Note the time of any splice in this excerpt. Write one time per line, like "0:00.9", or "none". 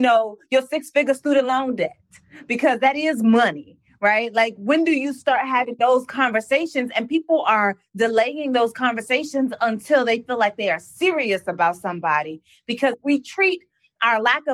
none